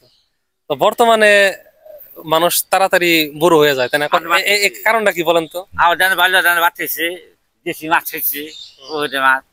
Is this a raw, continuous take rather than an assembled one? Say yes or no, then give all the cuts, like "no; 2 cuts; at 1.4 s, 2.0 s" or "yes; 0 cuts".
no; 1 cut; at 4.2 s